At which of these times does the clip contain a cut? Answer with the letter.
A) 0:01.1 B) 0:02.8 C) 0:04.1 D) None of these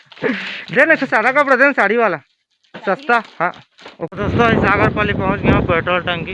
C